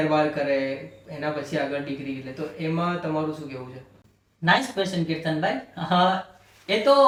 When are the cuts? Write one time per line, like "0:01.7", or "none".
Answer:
none